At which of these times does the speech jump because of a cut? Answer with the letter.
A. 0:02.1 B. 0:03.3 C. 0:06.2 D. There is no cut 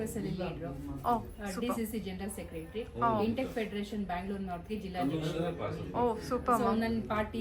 D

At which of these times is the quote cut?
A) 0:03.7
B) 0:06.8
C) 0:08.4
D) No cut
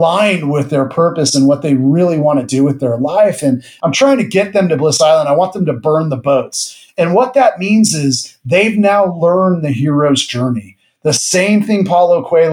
A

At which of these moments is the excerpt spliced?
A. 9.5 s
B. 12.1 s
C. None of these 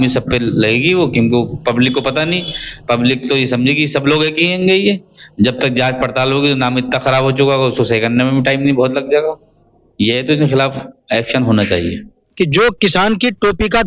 B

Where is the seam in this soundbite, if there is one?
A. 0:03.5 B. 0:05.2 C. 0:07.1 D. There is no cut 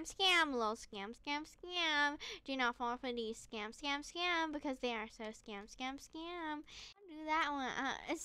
C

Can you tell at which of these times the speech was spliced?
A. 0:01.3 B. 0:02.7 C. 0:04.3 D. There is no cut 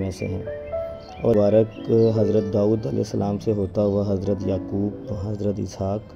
A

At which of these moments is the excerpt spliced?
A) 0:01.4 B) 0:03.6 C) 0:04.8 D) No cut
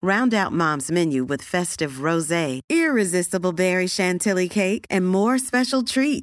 D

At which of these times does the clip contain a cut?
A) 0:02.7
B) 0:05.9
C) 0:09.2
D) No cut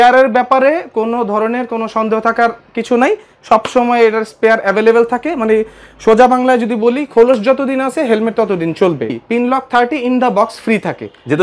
C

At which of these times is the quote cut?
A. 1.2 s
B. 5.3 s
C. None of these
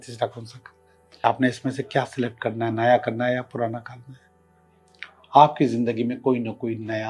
A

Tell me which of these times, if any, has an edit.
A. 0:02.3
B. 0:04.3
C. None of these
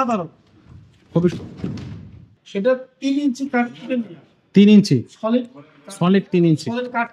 A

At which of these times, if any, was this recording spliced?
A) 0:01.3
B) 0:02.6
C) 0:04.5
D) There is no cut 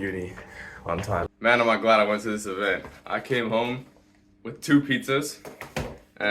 A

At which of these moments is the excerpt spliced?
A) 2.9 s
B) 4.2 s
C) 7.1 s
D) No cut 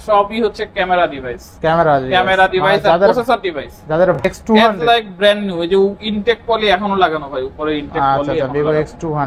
B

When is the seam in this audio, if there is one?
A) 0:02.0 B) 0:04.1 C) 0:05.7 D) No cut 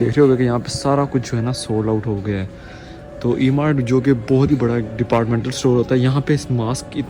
D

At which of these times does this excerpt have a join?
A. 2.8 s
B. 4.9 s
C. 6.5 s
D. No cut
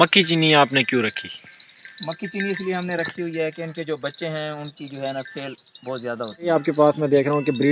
C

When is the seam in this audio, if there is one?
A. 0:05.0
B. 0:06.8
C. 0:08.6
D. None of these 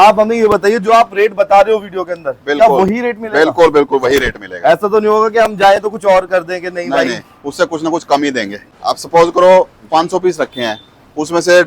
C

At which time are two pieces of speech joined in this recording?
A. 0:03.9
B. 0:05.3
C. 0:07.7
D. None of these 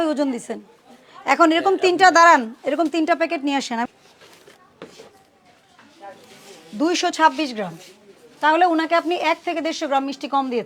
A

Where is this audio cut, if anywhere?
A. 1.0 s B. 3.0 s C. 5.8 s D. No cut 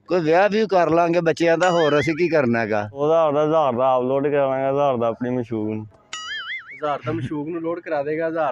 B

